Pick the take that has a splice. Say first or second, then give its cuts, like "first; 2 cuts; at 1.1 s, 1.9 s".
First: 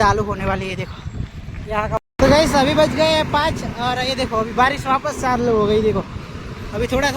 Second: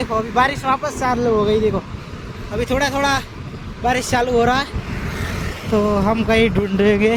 first; 1 cut; at 2.0 s